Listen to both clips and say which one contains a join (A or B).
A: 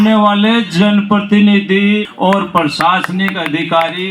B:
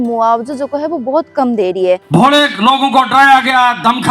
B